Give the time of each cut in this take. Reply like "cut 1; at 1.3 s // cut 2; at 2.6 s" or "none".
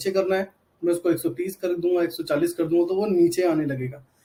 none